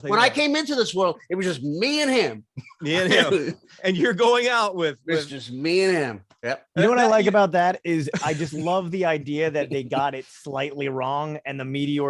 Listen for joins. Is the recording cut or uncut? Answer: uncut